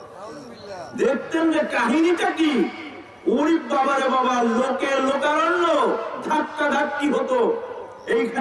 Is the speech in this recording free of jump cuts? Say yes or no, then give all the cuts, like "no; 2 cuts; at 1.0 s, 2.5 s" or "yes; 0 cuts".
yes; 0 cuts